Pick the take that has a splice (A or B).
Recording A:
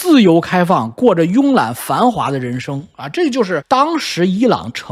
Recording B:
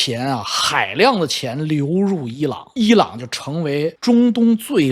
B